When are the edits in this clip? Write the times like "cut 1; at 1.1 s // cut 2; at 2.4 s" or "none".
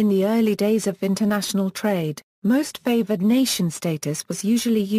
none

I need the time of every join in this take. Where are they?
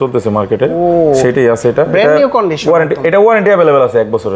none

